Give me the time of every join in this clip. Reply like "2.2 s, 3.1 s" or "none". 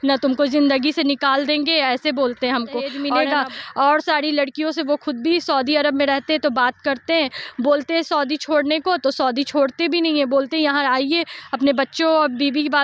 3.0 s